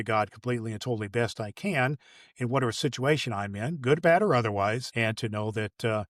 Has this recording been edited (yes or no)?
yes